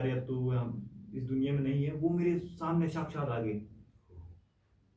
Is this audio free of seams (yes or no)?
yes